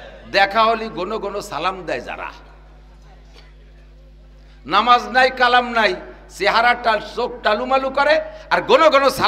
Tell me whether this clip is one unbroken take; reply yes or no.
yes